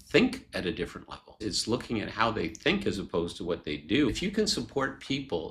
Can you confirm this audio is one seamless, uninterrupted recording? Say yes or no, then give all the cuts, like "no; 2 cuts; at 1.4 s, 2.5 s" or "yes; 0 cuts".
no; 2 cuts; at 1.3 s, 4.1 s